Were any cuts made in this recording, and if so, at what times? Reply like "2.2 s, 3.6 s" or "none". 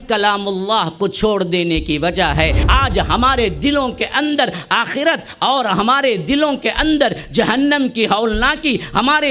2.6 s